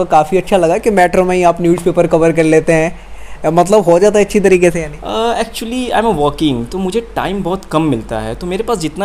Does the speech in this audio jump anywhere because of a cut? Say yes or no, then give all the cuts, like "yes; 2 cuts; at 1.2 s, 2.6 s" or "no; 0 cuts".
no; 0 cuts